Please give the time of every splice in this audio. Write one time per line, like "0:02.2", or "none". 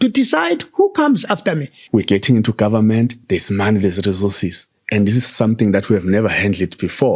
0:01.7